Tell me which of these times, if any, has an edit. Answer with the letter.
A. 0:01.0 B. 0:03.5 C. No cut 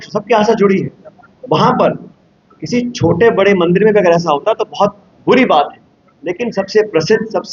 C